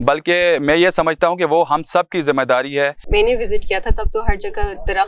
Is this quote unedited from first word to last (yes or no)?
no